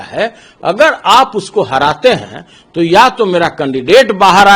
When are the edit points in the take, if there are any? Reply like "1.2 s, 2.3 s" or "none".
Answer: none